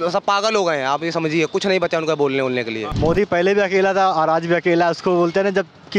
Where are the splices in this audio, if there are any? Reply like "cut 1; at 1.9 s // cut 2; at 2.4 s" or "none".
cut 1; at 2.9 s